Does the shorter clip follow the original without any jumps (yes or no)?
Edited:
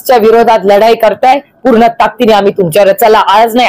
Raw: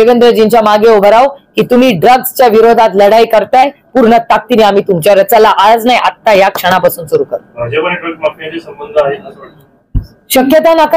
yes